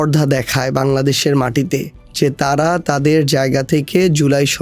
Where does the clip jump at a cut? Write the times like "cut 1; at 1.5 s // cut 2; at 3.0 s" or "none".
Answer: cut 1; at 2.0 s